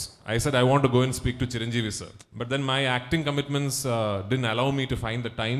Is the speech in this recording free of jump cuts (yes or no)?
yes